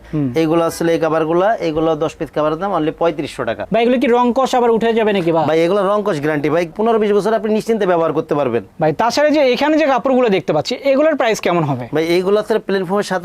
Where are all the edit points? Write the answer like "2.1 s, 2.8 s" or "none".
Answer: 3.6 s, 8.7 s